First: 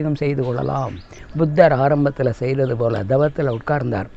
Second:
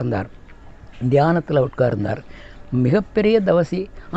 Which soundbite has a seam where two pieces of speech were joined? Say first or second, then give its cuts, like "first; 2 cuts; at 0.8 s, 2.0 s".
first; 1 cut; at 1.2 s